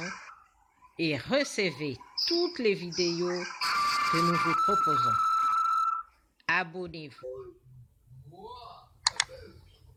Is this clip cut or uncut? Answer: uncut